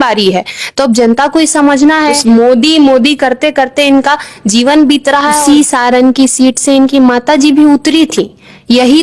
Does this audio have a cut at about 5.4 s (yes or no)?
yes